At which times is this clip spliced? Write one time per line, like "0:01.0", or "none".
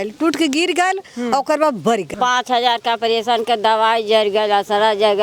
0:02.1